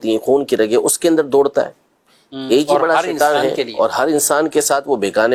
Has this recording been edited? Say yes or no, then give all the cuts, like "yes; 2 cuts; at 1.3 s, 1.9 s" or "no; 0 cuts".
no; 0 cuts